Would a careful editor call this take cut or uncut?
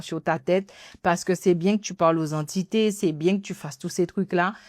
uncut